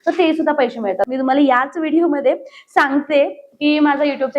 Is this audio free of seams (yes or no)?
no